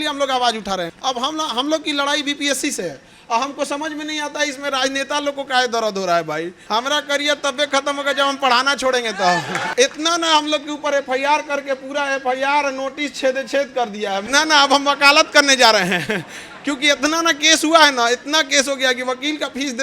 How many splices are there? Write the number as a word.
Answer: four